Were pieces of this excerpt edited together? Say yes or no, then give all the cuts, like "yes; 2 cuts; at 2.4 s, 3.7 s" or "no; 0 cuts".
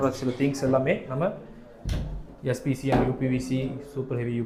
no; 0 cuts